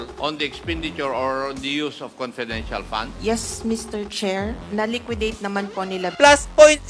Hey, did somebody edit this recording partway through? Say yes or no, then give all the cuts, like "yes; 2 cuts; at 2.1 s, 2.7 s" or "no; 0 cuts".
yes; 3 cuts; at 3.1 s, 4.6 s, 6.1 s